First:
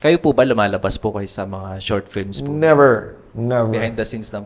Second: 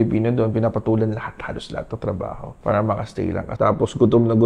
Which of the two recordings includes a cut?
second; 2 cuts; at 2.5 s, 3.4 s

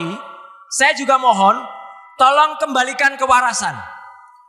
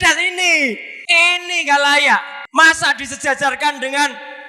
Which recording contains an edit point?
second; 2 cuts; at 0.9 s, 2.4 s

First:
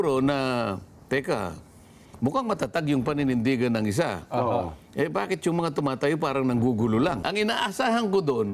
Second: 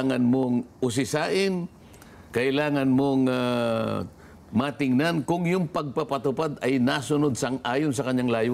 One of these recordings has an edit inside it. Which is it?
first; 1 cut; at 7.2 s

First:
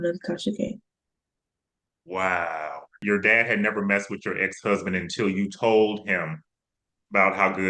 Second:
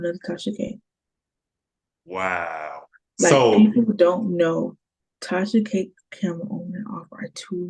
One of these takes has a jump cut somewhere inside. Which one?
first; 1 cut; at 3.0 s

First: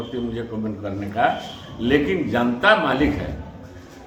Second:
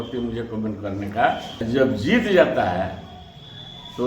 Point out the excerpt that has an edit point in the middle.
second; 1 cut; at 1.6 s

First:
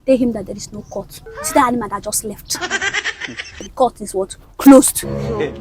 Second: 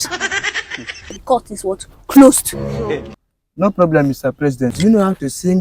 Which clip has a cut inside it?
second; 1 cut; at 4.7 s

